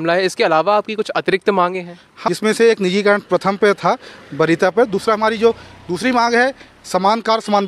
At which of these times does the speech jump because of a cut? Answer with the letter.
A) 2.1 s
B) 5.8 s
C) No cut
A